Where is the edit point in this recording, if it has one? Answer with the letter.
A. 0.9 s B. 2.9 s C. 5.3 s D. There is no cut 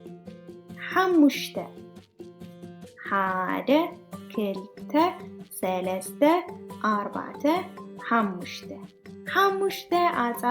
A